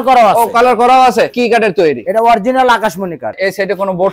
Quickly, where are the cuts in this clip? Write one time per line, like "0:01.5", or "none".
0:01.3
0:03.4